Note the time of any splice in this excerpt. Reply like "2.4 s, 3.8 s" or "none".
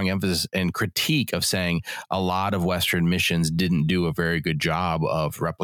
none